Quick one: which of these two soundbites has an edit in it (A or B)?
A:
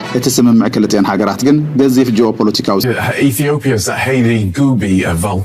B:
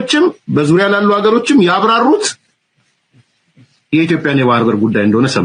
A